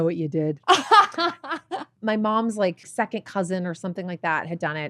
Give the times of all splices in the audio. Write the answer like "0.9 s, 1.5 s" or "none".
1.9 s, 2.9 s